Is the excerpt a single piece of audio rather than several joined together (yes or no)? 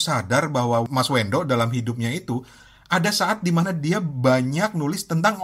yes